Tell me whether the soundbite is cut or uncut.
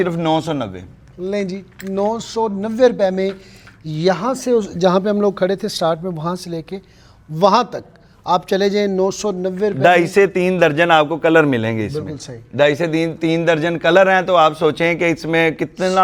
uncut